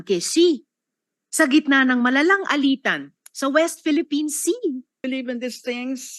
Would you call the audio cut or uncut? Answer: cut